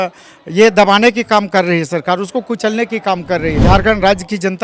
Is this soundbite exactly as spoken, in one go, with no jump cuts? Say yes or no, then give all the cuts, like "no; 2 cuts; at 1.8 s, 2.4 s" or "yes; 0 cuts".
no; 1 cut; at 3.6 s